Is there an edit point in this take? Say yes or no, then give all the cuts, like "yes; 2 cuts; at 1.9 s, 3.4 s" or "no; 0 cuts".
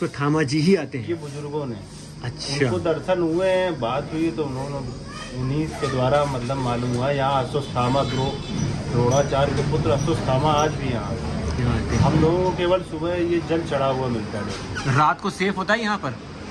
no; 0 cuts